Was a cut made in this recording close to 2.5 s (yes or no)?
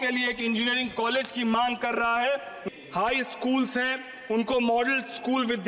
yes